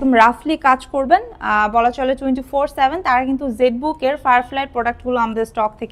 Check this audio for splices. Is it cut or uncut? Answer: uncut